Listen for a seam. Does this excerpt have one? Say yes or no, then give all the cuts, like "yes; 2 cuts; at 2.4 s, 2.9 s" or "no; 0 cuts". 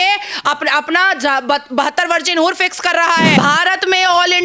yes; 1 cut; at 3.4 s